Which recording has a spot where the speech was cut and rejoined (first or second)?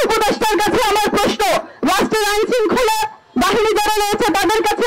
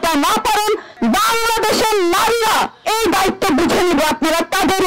second